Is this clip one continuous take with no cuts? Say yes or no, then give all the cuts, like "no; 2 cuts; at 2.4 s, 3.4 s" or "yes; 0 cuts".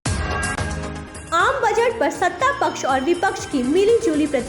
yes; 0 cuts